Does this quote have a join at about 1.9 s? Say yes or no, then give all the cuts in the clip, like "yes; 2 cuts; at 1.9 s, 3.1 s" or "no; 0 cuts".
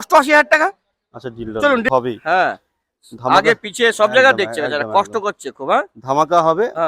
yes; 1 cut; at 1.9 s